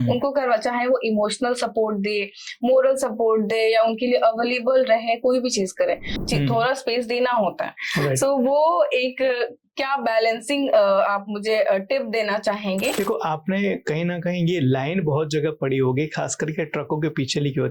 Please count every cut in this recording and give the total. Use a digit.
2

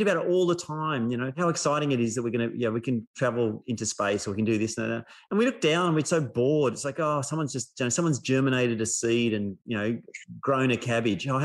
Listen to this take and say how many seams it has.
2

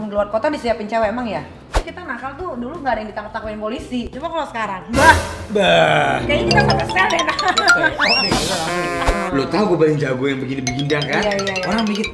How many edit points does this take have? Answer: 2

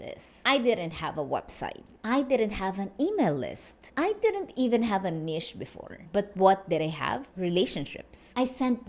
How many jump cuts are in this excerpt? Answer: 0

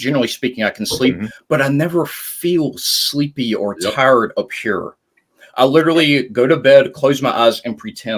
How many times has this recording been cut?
0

